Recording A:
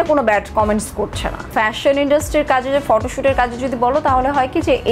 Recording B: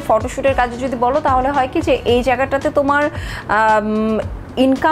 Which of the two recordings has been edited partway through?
A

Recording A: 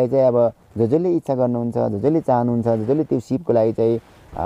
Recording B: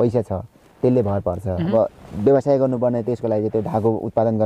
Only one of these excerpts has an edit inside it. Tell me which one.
B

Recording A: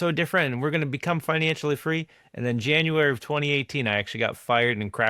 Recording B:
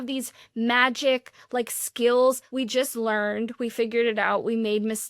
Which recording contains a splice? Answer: B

